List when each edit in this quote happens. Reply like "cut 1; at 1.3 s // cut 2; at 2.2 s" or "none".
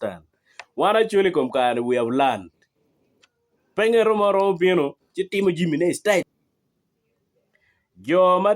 cut 1; at 6.3 s